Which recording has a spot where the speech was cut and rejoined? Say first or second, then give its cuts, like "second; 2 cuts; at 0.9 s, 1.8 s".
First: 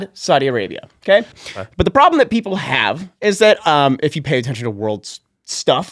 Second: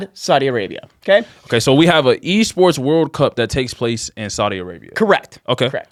first; 1 cut; at 1.4 s